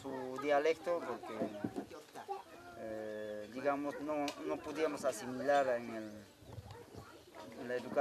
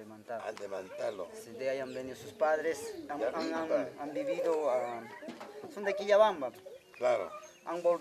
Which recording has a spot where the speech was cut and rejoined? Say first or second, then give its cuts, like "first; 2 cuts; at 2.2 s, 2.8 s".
second; 1 cut; at 3.7 s